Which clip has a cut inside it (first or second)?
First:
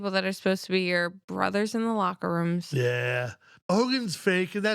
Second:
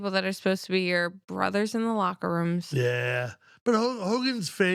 first